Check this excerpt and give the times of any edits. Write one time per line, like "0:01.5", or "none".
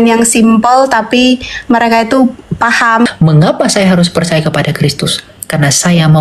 0:03.1

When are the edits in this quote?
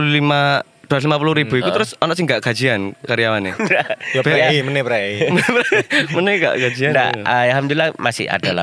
none

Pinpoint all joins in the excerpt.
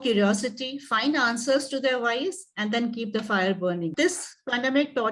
0:03.9

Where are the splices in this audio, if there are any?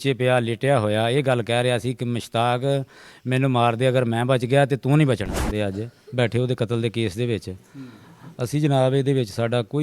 0:05.5

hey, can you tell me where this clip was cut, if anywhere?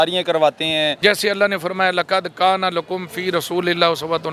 0:00.9

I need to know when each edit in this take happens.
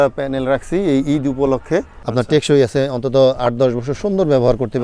0:02.0

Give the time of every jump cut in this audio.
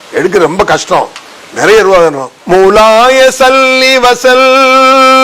0:02.3

